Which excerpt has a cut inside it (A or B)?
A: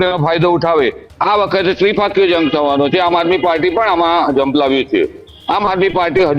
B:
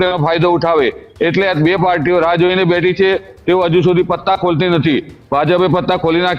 A